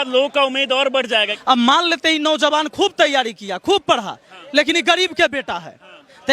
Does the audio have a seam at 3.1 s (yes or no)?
no